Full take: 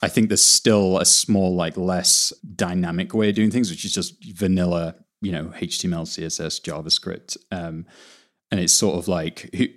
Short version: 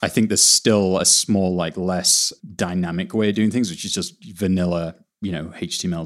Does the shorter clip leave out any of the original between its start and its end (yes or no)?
no